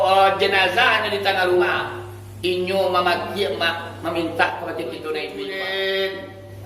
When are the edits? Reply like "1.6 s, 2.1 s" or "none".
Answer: 5.4 s